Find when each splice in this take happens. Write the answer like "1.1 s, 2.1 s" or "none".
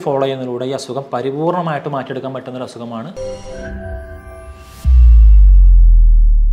3.1 s